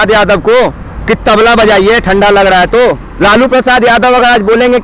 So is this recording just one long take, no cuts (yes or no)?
no